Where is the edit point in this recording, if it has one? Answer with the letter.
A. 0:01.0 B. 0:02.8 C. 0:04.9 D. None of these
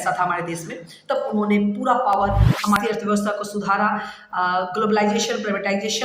B